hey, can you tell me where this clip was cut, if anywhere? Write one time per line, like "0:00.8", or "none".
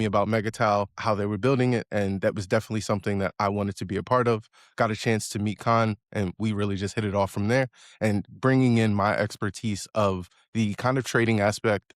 0:00.9